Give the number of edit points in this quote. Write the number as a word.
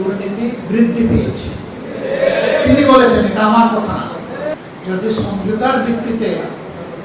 one